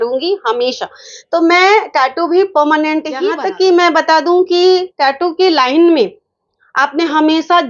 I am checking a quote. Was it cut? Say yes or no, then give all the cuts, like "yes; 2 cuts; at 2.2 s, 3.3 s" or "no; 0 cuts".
yes; 1 cut; at 3.3 s